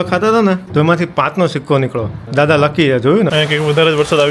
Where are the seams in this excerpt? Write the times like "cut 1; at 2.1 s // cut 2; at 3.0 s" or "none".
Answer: cut 1; at 3.3 s

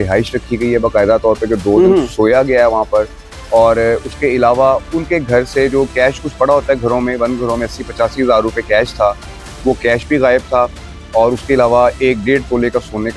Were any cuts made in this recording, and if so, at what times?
none

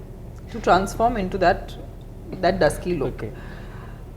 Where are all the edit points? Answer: none

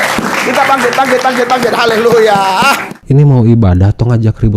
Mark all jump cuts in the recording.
cut 1; at 2.9 s

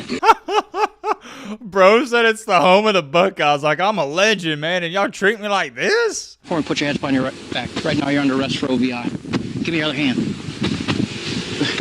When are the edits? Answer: cut 1; at 6.5 s

